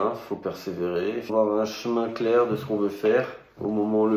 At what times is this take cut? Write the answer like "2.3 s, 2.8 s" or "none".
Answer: 1.3 s